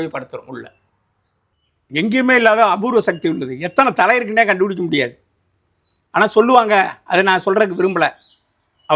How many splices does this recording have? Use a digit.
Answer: 1